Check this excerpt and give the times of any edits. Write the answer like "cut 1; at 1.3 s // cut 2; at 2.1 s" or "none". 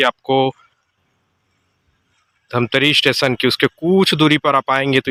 none